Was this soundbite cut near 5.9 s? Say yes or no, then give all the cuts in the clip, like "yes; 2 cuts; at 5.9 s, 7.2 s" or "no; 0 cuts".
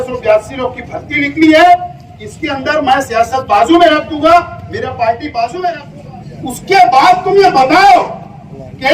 yes; 1 cut; at 5.9 s